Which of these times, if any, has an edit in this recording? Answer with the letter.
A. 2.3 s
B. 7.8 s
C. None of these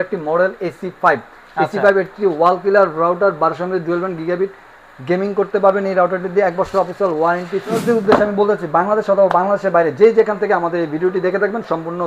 B